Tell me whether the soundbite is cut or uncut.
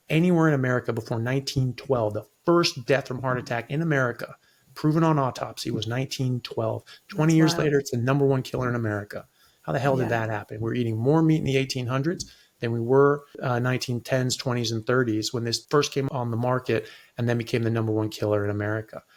uncut